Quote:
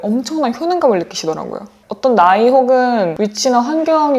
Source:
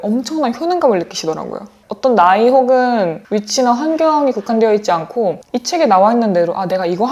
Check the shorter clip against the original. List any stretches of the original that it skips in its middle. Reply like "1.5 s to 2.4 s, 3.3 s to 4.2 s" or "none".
3.1 s to 3.3 s